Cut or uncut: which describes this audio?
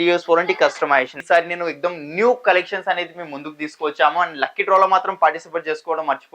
cut